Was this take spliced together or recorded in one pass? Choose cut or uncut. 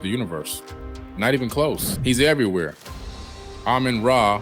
cut